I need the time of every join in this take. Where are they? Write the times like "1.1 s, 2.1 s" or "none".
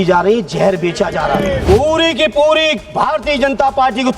1.6 s